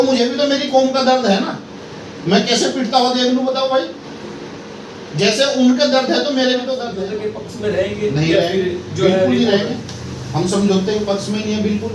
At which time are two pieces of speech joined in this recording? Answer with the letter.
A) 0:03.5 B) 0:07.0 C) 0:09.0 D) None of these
B